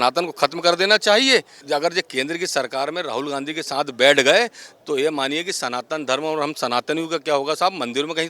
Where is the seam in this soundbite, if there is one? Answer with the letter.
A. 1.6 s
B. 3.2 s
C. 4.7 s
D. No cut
A